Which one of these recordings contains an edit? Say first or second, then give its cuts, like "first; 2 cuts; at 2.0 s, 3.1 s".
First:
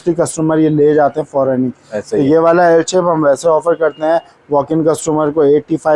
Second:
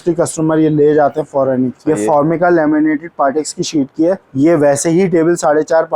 second; 2 cuts; at 1.8 s, 4.3 s